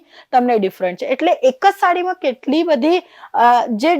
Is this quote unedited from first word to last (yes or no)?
yes